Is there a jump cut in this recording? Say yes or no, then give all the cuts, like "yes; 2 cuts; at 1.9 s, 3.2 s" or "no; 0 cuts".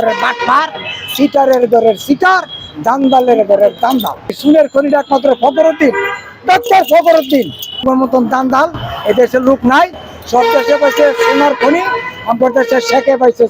yes; 2 cuts; at 4.4 s, 7.8 s